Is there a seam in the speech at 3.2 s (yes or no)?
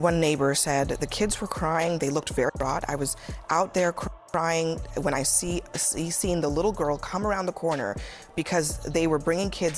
no